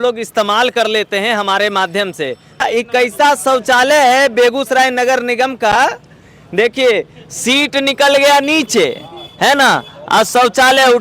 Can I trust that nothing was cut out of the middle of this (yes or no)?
no